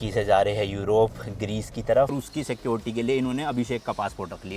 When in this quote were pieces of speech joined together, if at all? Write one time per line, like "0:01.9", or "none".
0:02.1